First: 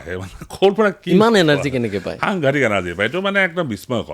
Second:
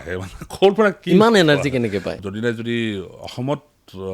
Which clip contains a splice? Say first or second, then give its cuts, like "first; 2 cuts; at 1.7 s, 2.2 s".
second; 1 cut; at 2.2 s